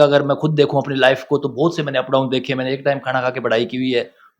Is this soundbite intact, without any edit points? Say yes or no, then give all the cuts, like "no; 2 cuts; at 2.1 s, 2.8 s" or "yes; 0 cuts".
yes; 0 cuts